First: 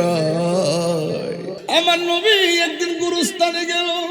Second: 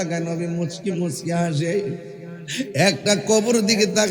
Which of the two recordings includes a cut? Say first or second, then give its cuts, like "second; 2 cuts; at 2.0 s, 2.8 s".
first; 1 cut; at 1.6 s